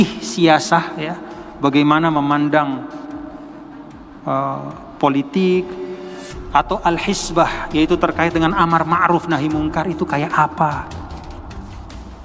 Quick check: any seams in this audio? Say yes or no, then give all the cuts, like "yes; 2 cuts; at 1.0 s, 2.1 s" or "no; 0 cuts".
no; 0 cuts